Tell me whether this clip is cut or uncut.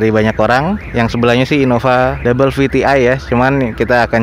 uncut